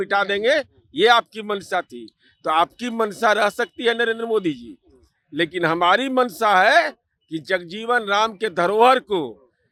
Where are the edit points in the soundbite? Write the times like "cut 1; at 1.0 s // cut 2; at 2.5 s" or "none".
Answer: none